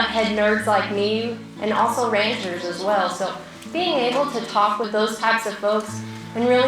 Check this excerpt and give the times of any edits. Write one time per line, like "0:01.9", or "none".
0:01.4
0:04.9